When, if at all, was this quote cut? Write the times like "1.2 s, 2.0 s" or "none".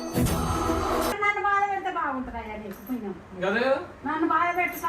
1.2 s